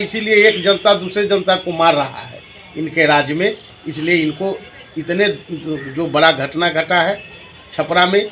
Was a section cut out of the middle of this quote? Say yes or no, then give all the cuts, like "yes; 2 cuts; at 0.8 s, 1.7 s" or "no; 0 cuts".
no; 0 cuts